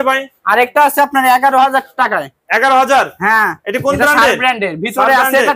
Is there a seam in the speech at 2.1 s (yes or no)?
no